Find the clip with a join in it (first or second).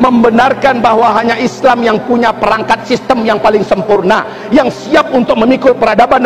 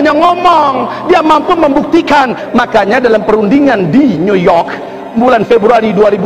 second